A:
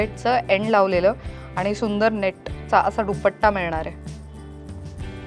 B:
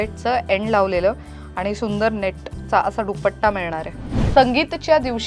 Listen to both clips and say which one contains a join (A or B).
B